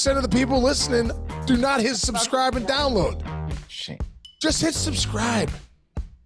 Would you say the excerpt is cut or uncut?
uncut